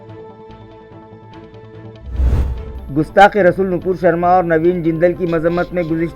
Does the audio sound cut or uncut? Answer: cut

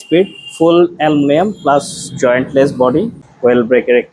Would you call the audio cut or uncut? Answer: cut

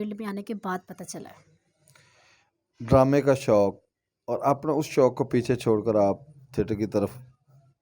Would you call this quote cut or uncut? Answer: uncut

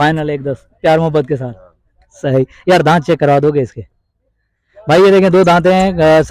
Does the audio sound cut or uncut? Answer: uncut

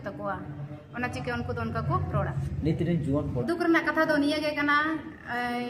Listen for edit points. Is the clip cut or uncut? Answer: cut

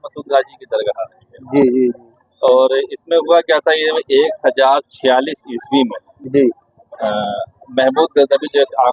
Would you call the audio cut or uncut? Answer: uncut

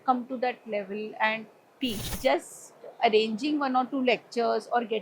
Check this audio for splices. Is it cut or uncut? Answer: cut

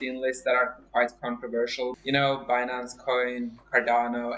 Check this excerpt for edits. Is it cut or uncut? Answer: cut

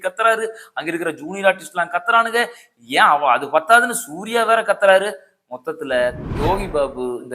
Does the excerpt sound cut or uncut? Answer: cut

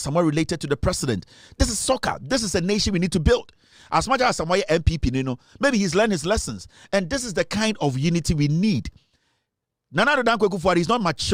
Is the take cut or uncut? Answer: uncut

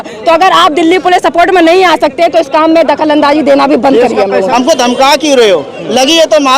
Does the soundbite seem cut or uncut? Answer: cut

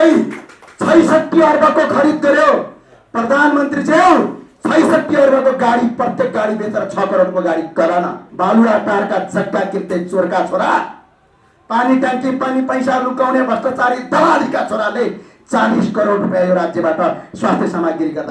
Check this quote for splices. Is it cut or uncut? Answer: cut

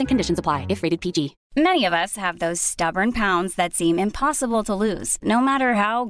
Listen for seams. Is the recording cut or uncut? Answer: cut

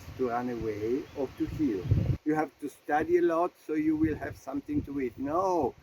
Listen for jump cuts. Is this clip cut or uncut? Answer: cut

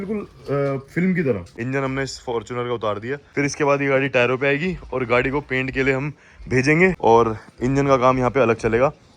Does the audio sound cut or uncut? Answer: cut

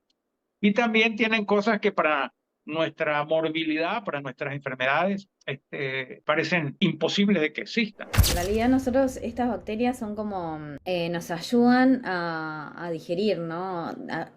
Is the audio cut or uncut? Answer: cut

